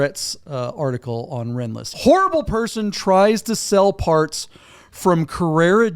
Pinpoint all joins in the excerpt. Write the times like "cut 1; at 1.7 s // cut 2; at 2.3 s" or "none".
cut 1; at 1.9 s